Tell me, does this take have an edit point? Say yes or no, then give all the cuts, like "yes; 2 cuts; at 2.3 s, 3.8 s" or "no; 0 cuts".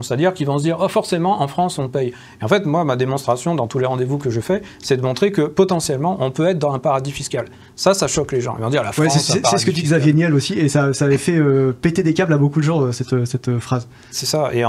no; 0 cuts